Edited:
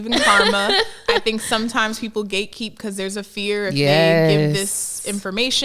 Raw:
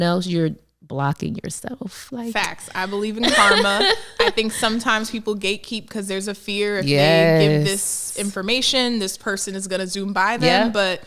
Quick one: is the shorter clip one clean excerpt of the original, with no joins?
yes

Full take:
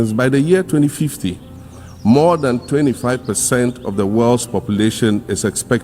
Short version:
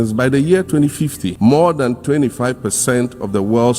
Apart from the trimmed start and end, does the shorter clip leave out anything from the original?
yes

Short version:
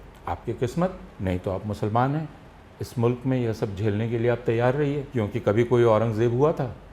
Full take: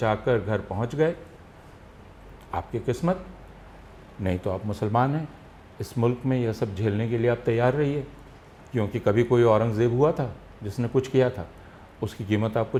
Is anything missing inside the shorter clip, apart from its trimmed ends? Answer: yes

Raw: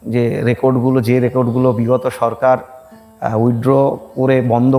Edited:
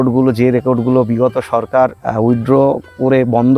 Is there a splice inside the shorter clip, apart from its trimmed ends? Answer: yes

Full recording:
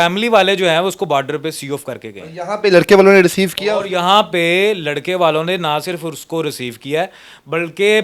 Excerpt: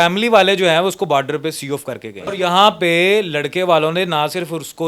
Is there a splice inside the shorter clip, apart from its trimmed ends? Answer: yes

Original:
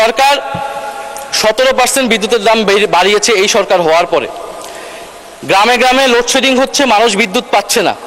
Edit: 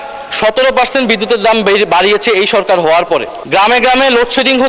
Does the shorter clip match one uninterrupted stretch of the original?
no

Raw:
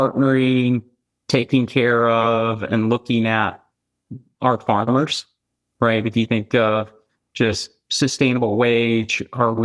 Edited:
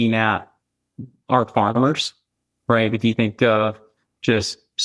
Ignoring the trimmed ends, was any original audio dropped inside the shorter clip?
no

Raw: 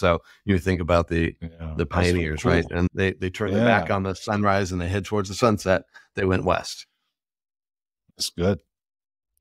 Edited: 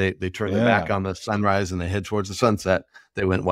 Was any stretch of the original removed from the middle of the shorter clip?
no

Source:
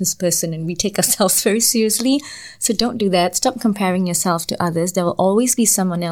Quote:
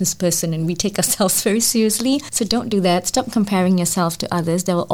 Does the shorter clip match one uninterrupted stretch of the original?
no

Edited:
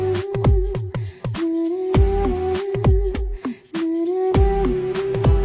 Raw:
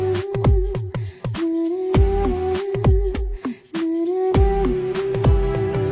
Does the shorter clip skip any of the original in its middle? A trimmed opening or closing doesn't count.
no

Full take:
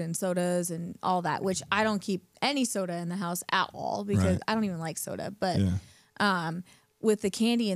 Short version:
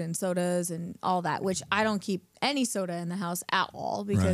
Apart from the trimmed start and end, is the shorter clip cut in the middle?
no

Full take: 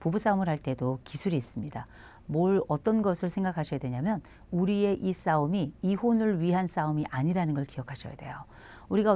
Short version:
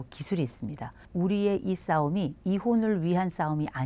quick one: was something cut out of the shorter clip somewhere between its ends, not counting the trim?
yes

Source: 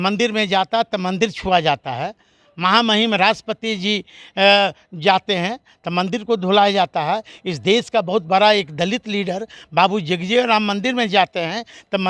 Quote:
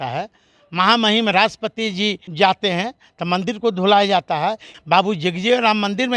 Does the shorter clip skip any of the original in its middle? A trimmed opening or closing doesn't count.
yes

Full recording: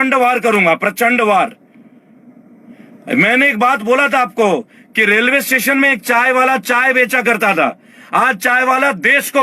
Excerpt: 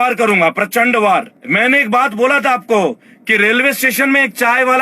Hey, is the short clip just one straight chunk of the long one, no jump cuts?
no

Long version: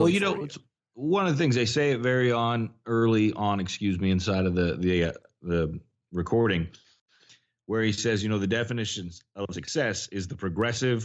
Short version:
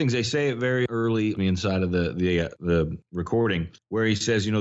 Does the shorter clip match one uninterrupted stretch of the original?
no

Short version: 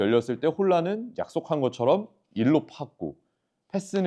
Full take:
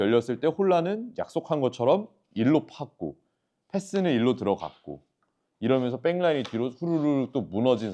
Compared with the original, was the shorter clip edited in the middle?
no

